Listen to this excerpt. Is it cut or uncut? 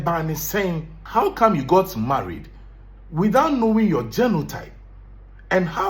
cut